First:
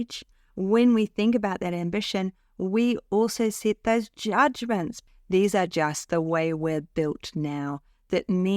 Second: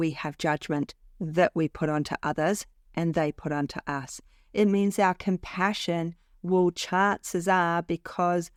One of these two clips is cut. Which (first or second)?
first